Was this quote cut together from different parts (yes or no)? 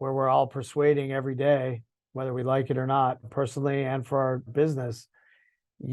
yes